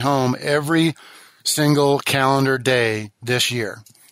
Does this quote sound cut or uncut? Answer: uncut